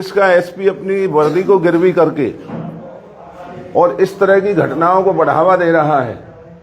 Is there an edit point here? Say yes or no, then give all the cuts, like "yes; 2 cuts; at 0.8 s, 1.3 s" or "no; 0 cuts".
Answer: no; 0 cuts